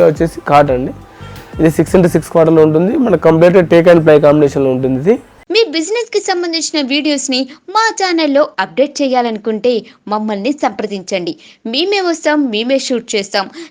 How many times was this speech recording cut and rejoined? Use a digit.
1